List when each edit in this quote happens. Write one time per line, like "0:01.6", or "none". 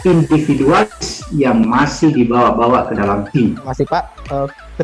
0:03.7